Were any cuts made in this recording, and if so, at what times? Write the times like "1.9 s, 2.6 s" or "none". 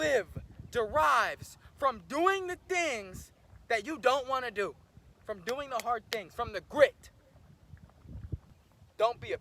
8.5 s